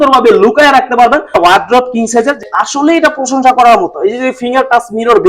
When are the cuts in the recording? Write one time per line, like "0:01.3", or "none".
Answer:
0:01.3
0:02.5